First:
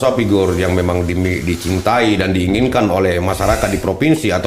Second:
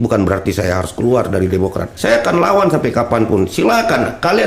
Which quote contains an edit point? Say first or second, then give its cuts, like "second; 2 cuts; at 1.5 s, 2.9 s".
second; 1 cut; at 1.9 s